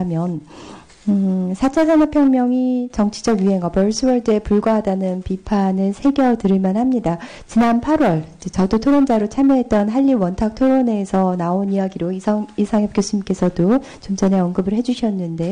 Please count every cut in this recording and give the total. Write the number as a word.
one